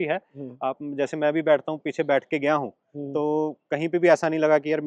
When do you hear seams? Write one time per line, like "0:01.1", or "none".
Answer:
none